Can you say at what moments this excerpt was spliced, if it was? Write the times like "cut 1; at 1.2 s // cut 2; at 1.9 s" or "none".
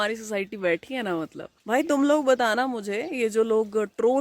cut 1; at 1.5 s